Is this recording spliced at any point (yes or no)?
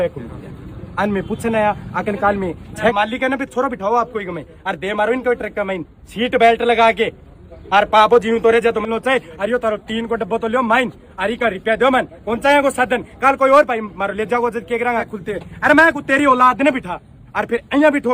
yes